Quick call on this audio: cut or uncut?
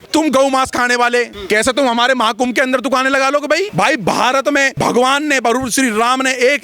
cut